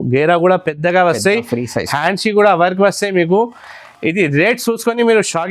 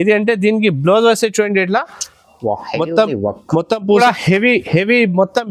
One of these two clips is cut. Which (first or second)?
second